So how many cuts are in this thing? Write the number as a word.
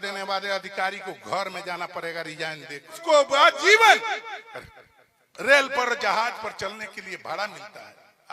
one